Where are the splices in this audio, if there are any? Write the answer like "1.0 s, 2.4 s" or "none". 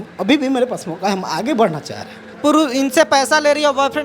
2.2 s